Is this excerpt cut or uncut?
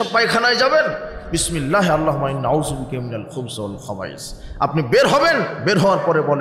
uncut